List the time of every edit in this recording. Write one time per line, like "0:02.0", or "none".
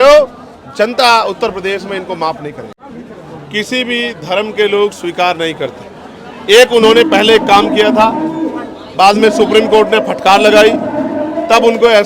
0:02.8